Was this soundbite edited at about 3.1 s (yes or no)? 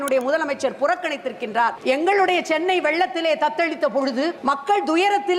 no